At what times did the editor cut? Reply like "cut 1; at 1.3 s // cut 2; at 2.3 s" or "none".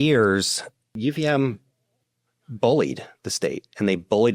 cut 1; at 1.0 s

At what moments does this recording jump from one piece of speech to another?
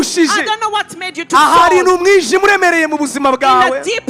none

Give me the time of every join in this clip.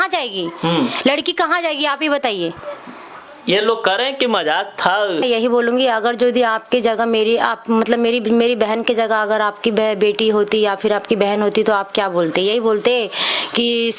cut 1; at 5.2 s

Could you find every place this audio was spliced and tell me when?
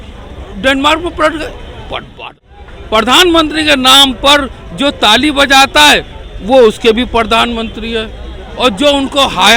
cut 1; at 2.1 s

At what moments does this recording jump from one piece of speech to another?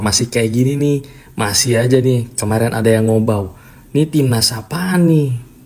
none

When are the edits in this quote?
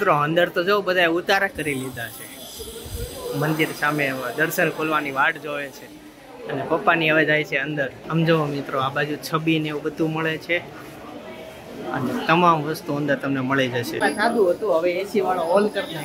none

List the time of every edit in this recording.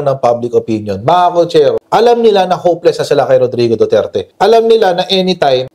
none

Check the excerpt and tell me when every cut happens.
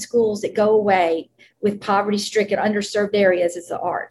none

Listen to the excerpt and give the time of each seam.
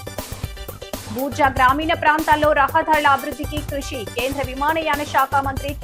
none

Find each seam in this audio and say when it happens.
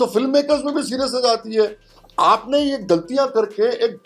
cut 1; at 1.9 s

